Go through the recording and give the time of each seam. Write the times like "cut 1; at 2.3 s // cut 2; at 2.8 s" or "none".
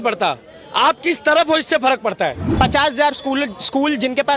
cut 1; at 2.4 s